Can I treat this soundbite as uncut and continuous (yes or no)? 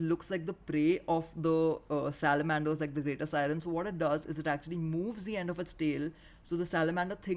yes